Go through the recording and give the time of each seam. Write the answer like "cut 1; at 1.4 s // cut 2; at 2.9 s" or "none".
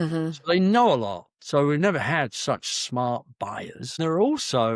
cut 1; at 3.8 s